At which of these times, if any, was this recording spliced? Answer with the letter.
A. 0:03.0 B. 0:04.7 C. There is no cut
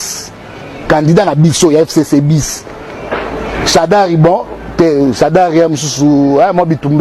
C